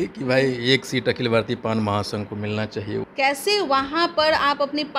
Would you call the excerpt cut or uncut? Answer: cut